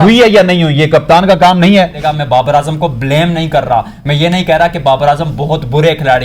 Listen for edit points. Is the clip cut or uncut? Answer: cut